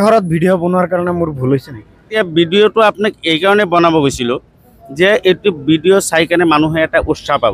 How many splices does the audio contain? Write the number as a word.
one